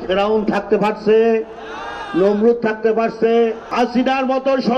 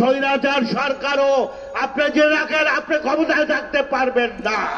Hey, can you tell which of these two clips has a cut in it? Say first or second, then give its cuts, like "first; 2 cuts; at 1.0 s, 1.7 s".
first; 1 cut; at 3.6 s